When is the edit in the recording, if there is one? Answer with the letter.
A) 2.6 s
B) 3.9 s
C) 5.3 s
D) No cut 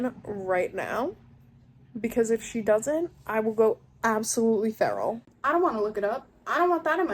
C